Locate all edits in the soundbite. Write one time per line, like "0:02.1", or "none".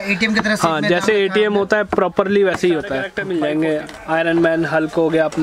0:03.1